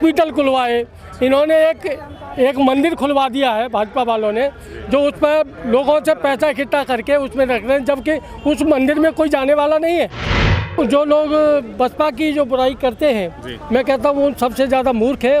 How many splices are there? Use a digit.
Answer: 1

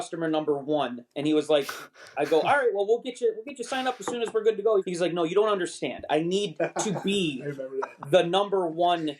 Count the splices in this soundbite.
1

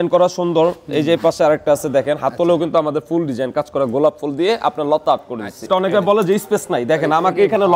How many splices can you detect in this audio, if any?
1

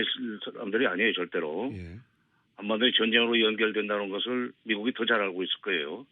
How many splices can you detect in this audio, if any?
1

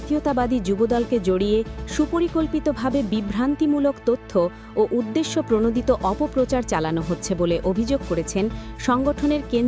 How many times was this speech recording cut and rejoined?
0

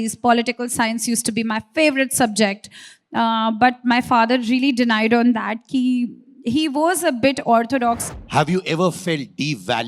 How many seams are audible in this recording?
1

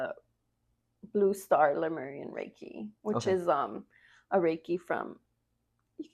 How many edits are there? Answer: 0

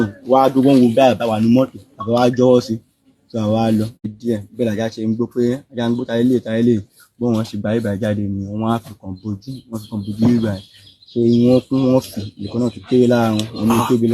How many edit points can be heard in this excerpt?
1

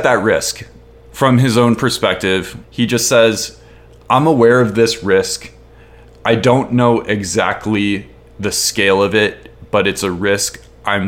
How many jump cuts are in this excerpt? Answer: 1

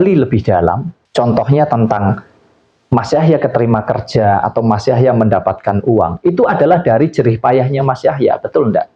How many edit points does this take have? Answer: 1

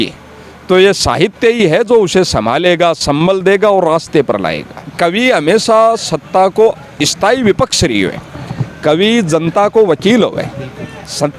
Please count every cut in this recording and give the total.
1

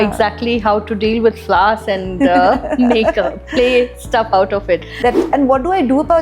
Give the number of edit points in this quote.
1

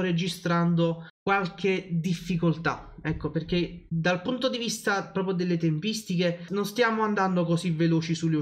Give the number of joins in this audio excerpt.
3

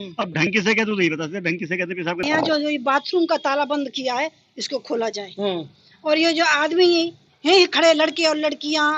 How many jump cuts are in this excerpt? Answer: 1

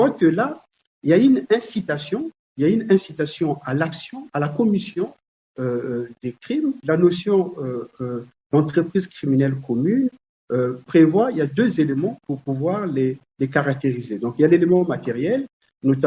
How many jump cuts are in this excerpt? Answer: 1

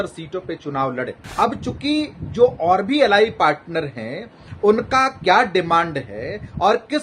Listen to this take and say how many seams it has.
1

